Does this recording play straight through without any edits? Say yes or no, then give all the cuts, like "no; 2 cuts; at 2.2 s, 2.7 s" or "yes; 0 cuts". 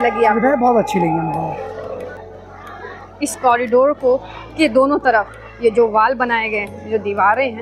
no; 1 cut; at 2.1 s